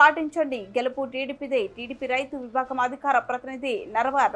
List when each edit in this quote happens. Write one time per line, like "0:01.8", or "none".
none